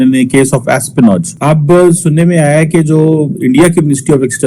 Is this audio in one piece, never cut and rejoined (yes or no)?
no